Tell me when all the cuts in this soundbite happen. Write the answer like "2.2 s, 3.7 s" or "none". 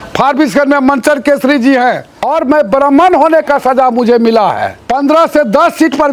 2.3 s, 4.7 s